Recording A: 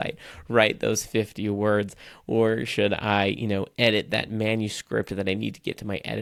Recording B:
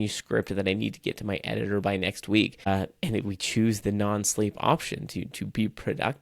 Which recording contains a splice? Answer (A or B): B